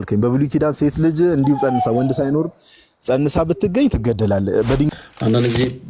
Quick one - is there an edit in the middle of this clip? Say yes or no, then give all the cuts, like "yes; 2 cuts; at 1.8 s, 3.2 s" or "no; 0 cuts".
yes; 1 cut; at 4.9 s